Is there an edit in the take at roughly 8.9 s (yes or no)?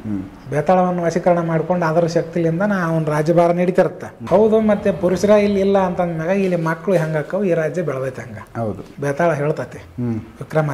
yes